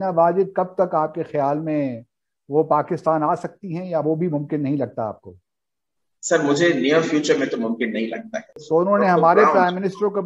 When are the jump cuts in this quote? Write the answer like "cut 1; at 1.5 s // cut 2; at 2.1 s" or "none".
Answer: cut 1; at 8.6 s